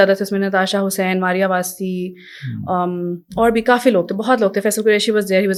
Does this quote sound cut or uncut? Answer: uncut